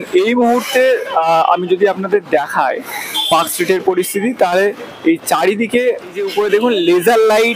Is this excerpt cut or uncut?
cut